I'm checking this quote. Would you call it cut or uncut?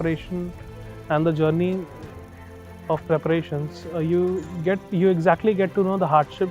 uncut